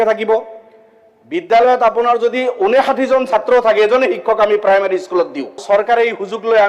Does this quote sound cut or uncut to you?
cut